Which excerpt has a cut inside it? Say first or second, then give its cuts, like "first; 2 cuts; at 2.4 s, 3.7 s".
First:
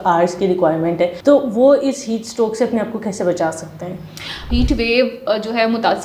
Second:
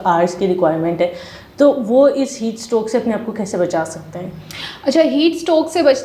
first; 2 cuts; at 1.2 s, 4.4 s